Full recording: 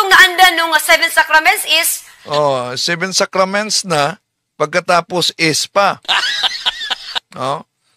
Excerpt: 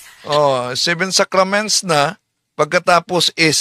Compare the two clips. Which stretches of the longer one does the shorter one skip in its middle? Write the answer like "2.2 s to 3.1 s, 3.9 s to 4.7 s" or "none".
none